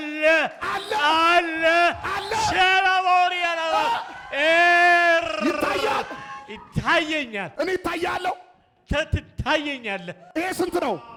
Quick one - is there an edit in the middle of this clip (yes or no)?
no